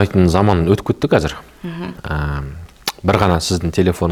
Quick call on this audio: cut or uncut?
uncut